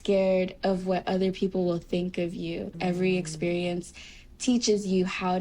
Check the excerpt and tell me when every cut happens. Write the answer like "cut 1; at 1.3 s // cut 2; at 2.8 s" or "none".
cut 1; at 2.7 s